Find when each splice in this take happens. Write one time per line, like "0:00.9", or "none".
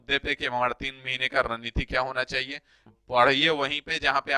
0:02.9